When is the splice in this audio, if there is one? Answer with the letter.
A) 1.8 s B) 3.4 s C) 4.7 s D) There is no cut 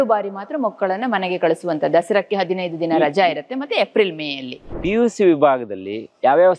D